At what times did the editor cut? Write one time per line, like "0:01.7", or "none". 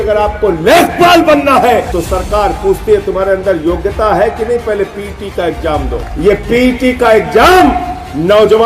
0:01.9
0:06.0